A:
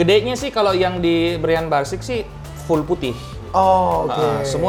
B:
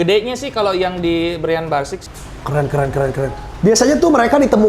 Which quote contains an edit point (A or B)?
B